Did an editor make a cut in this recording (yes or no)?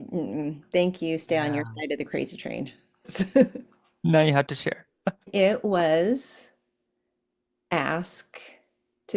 yes